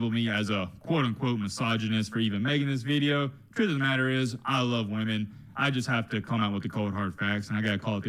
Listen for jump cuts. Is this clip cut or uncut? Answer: uncut